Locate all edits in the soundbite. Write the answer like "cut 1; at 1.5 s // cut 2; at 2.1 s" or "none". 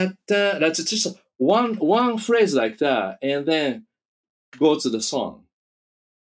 none